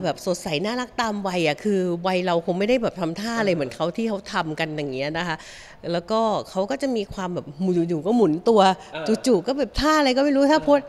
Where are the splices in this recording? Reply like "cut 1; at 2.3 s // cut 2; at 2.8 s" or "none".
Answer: none